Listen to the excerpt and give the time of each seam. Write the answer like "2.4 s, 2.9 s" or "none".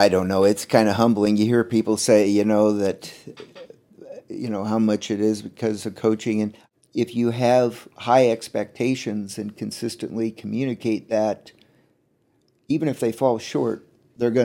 6.6 s